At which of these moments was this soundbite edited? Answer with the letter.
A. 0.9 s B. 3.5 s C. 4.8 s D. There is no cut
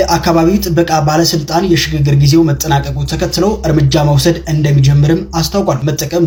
D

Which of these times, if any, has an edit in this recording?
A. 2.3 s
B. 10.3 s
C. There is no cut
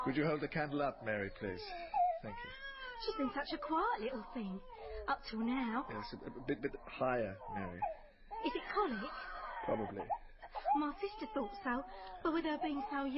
C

